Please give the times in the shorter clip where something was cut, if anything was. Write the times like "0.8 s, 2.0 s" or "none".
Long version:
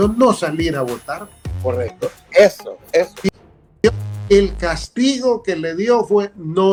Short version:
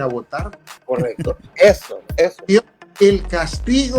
2.5 s